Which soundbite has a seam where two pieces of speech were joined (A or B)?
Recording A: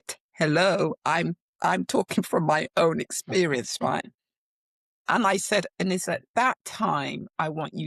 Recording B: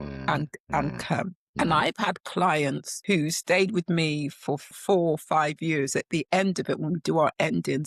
B